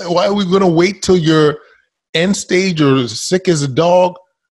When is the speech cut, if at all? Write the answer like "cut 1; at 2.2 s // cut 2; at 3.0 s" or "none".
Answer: none